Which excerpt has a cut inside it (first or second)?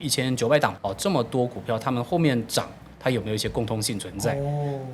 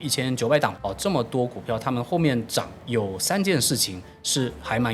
second